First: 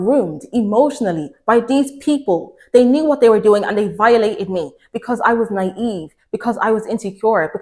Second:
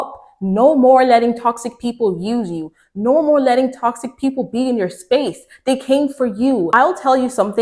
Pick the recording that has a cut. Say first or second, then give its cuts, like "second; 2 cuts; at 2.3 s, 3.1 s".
second; 1 cut; at 6.7 s